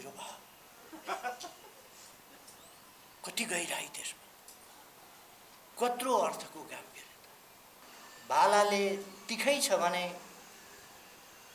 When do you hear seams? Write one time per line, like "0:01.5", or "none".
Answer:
0:07.8